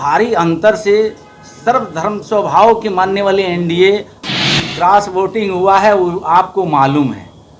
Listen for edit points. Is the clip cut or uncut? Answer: cut